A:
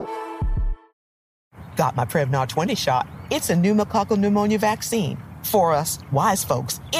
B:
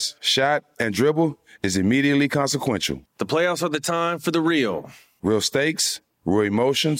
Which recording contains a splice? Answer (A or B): A